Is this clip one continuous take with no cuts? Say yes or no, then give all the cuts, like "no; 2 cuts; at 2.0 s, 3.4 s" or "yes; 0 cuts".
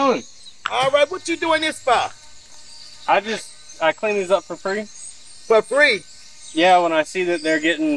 yes; 0 cuts